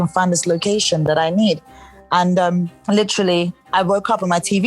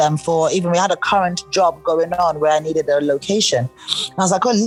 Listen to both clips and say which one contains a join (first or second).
first